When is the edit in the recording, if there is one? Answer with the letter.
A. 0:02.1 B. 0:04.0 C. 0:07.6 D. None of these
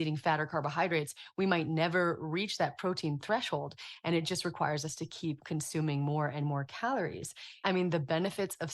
C